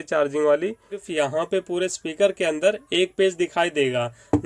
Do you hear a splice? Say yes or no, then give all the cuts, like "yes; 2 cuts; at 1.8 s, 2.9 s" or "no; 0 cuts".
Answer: yes; 1 cut; at 1.0 s